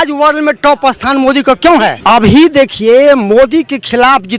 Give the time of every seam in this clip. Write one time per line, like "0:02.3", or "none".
0:02.0